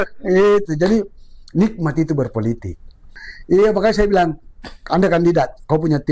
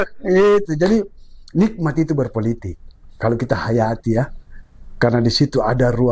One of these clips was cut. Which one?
first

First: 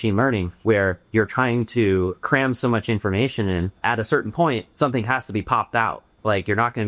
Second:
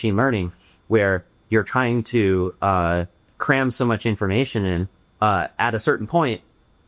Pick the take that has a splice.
first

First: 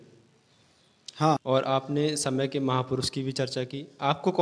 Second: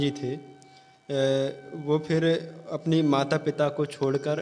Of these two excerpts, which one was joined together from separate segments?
first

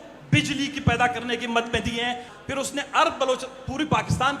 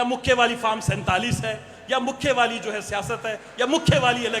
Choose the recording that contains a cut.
first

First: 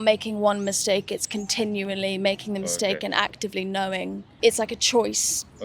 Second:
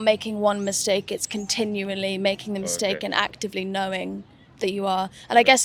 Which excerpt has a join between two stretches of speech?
first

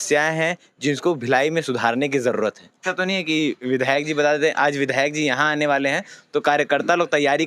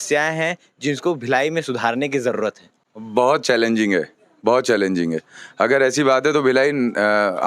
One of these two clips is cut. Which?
first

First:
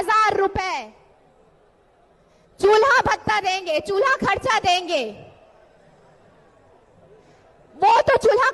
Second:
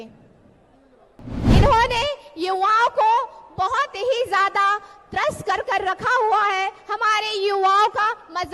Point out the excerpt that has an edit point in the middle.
second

